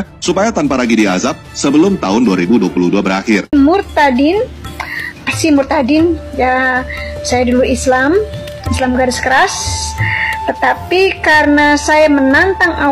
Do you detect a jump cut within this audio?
yes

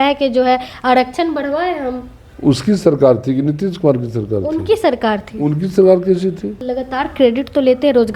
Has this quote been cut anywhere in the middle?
yes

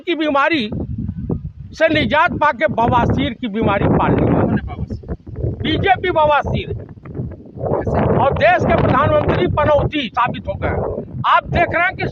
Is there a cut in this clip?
no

